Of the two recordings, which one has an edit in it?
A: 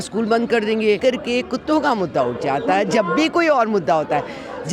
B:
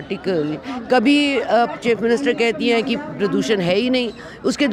A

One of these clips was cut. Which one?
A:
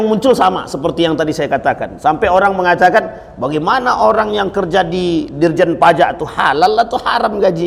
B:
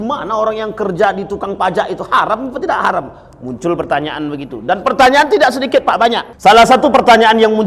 B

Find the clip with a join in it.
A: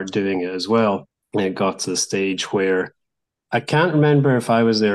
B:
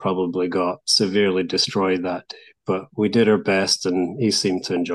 A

